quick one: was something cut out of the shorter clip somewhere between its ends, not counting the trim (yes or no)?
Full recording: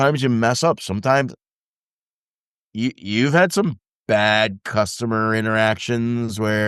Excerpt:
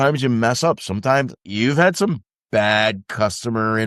yes